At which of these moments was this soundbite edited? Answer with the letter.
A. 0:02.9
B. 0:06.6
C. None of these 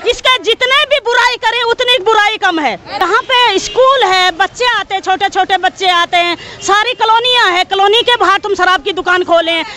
A